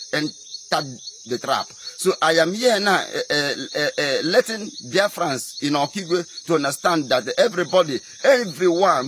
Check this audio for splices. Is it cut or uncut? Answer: cut